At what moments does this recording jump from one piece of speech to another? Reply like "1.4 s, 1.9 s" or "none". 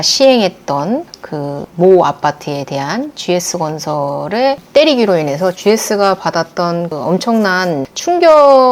none